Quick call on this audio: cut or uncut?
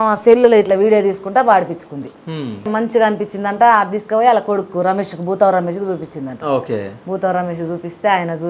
cut